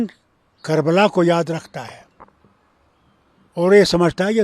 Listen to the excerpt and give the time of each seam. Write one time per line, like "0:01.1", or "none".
none